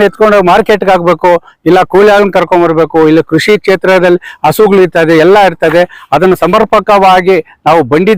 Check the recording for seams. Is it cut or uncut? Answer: uncut